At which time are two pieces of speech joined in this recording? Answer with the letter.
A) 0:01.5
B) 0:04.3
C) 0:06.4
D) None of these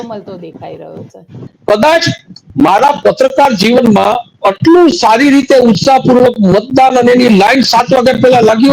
A